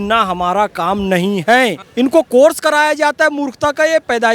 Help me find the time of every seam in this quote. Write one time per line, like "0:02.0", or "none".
0:01.8